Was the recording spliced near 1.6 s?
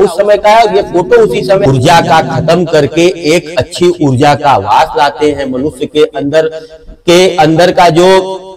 yes; 1 cut; at 1.6 s

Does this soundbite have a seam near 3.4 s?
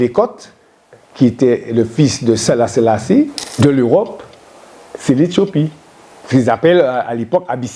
yes; 1 cut; at 3.4 s

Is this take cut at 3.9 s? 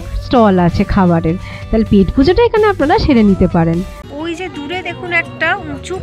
yes; 1 cut; at 3.9 s

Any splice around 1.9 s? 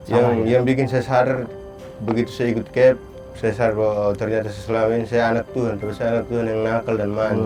no; 0 cuts

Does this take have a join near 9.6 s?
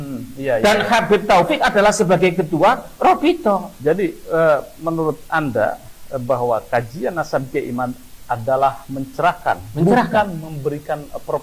no; 1 cut; at 3.7 s

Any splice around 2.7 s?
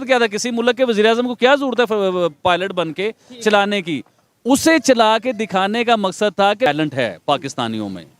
no; 1 cut; at 6.7 s

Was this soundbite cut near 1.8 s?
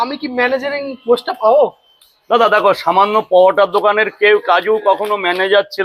no; 0 cuts

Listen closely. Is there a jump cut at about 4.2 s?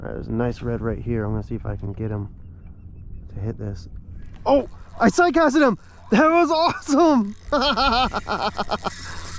no; 0 cuts

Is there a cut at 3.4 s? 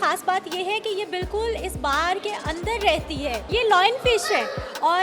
yes; 1 cut; at 3.4 s

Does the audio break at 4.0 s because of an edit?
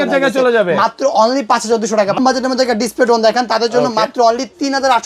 no; 1 cut; at 2.2 s

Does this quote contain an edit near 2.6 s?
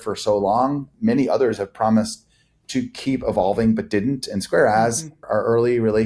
no; 2 cuts; at 0.9 s, 5.3 s

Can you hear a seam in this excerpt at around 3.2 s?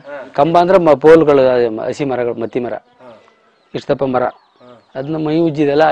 no; 0 cuts

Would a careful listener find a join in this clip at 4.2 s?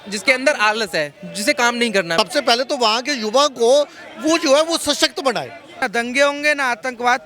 no; 2 cuts; at 2.2 s, 5.8 s

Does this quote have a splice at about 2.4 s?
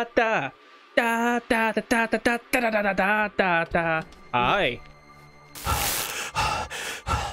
no; 1 cut; at 4.1 s

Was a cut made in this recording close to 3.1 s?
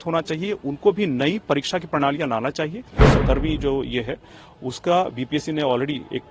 yes; 1 cut; at 3.1 s

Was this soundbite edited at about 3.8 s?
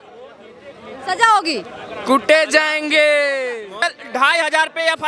yes; 1 cut; at 3.8 s

